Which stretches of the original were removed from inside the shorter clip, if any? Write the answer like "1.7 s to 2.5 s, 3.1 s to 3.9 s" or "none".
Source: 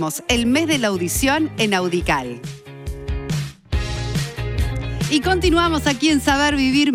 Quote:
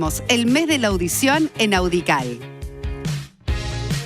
2.4 s to 2.7 s